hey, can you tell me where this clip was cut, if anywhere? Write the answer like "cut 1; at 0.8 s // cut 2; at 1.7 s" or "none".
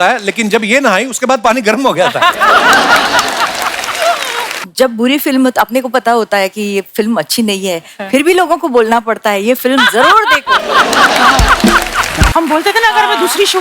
cut 1; at 4.6 s // cut 2; at 12.3 s